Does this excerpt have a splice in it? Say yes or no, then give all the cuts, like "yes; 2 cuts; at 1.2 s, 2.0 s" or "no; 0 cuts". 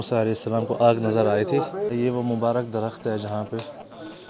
yes; 1 cut; at 1.9 s